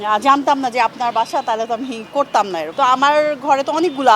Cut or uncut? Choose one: cut